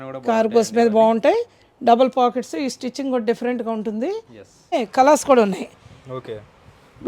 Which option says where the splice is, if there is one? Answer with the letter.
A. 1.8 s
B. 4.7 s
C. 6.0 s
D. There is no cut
B